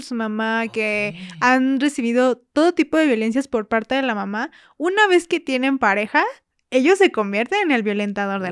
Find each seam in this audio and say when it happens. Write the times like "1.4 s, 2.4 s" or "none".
none